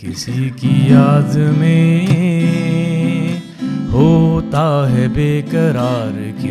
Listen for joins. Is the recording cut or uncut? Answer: uncut